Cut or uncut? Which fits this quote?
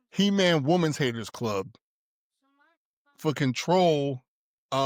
uncut